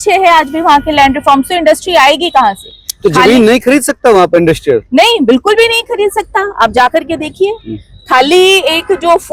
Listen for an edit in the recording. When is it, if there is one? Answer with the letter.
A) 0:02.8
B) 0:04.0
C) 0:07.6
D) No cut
D